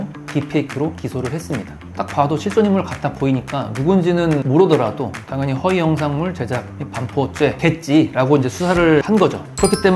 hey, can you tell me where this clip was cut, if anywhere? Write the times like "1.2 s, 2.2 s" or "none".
1.9 s, 4.4 s, 7.6 s, 9.0 s